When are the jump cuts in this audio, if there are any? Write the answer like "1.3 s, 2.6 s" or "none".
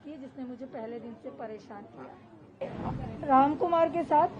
2.7 s